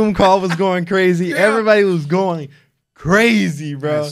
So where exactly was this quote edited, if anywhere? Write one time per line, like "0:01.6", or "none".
none

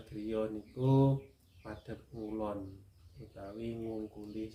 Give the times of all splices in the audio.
none

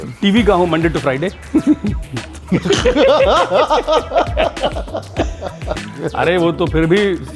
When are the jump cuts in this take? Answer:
0:05.8

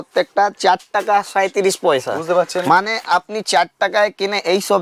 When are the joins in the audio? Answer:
none

